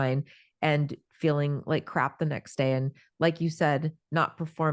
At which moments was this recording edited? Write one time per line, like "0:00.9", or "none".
none

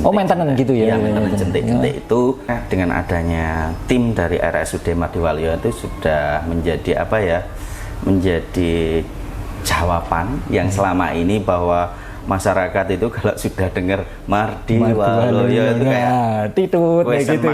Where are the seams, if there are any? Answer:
0:02.5

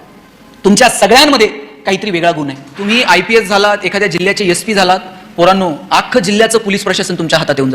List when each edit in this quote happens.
0:02.9

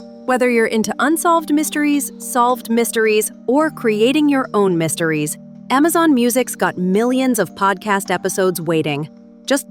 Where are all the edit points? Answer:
none

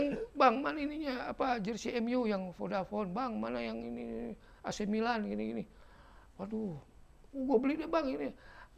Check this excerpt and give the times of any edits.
none

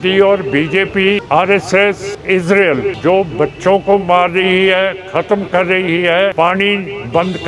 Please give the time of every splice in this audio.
0:01.2
0:02.1
0:03.0
0:06.3

